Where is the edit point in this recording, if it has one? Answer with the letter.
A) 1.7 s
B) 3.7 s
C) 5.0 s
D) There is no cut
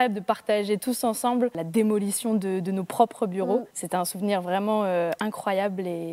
B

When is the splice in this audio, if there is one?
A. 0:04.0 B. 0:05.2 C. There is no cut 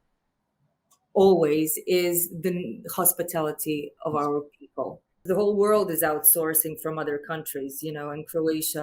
B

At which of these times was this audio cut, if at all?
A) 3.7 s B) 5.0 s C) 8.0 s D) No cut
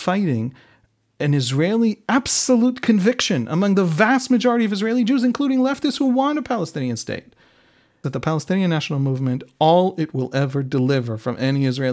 C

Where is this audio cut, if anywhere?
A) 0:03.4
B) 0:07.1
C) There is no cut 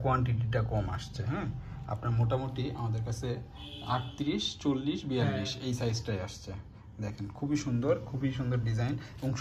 C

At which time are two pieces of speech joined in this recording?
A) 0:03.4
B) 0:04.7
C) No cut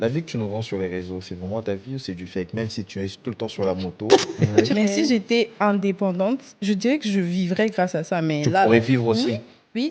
B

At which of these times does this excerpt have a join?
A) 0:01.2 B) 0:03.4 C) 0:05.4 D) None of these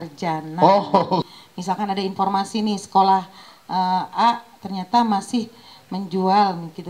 A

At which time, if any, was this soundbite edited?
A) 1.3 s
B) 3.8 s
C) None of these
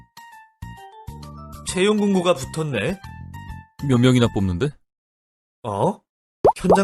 A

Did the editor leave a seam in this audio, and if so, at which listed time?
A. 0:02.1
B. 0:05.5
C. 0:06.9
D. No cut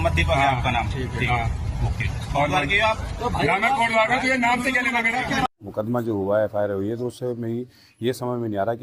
B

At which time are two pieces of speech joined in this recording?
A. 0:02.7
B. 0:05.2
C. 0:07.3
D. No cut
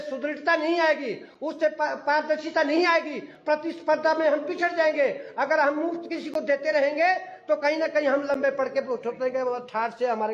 D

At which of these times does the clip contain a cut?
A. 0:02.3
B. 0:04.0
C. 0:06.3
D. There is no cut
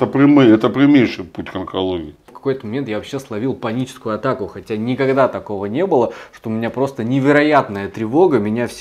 A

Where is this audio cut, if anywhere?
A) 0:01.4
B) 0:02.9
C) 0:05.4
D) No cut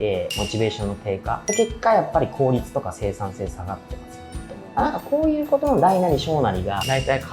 A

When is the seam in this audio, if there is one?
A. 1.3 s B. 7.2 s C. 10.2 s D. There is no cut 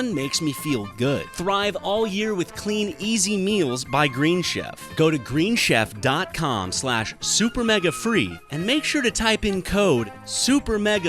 A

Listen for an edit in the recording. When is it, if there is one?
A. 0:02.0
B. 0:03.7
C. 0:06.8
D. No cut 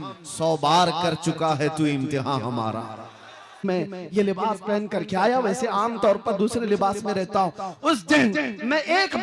B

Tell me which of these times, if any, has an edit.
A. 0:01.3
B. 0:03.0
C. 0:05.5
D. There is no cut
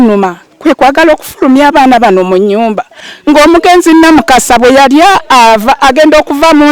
B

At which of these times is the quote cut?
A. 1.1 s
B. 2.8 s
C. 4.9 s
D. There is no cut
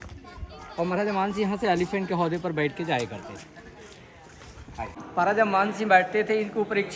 C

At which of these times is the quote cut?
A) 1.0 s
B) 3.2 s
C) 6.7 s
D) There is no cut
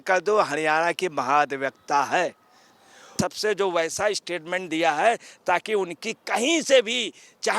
B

